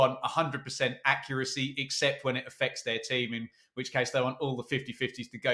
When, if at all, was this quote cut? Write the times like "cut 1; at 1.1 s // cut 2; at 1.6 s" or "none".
none